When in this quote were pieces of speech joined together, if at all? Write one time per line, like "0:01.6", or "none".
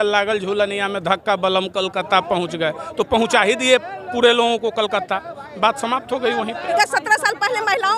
0:06.8